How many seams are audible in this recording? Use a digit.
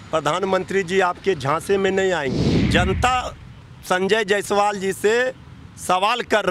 1